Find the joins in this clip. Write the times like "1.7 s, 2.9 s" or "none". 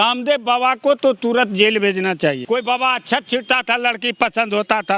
2.4 s